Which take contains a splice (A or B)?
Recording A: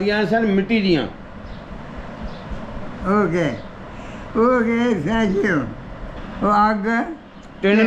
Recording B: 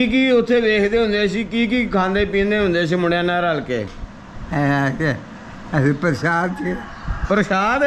A